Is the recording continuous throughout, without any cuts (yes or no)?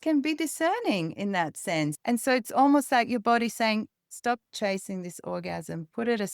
no